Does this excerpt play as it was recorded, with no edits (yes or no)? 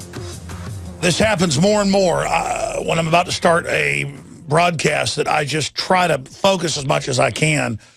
no